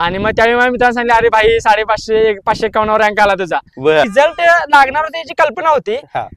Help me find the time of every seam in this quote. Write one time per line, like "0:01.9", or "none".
0:04.1